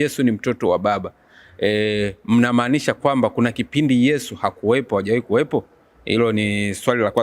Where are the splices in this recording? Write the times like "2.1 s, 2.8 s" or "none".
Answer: none

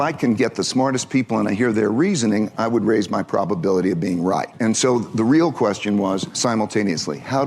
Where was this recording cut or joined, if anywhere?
4.5 s, 6.3 s

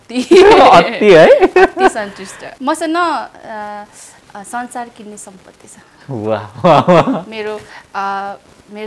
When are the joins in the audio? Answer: 2.5 s

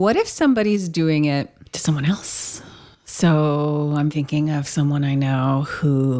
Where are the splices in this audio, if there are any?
1.6 s

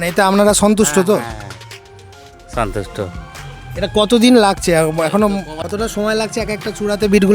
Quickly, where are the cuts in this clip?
5.5 s

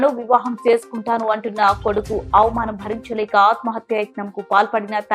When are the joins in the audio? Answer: none

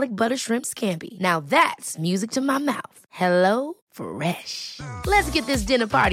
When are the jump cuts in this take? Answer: none

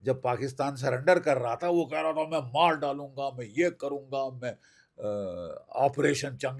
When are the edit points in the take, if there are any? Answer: none

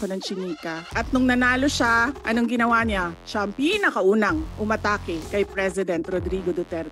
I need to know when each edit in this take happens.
0.8 s, 5.2 s

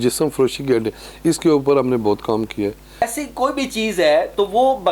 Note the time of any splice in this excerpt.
3.0 s

